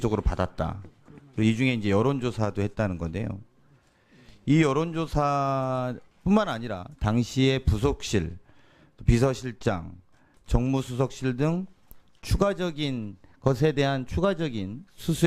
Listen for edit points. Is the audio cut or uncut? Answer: cut